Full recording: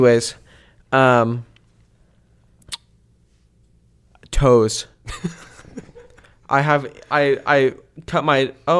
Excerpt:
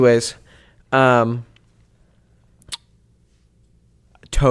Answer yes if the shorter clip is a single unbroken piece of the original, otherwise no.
yes